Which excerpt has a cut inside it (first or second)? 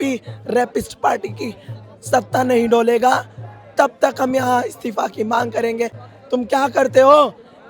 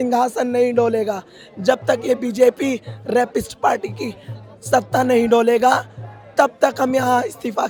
first